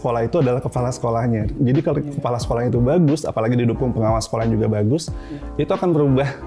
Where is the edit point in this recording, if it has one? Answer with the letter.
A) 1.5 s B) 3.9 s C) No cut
A